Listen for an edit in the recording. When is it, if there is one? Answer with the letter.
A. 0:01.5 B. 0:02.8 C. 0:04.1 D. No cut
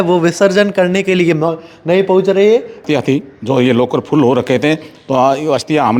B